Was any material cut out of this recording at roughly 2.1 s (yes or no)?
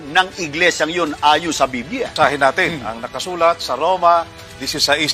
yes